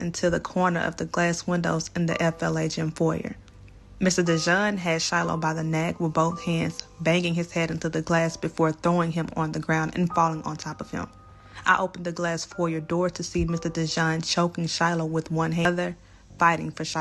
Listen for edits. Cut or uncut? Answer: cut